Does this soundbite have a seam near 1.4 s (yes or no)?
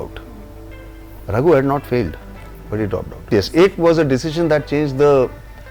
no